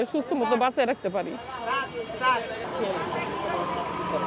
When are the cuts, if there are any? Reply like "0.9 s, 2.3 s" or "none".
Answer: 2.6 s

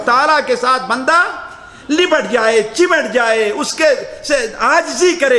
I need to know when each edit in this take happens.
none

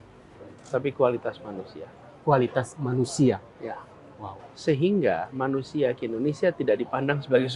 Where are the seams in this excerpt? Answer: none

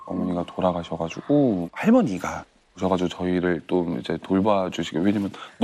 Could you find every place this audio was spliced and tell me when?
1.7 s

